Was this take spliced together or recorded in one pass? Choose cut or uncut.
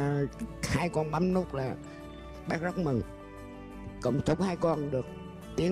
uncut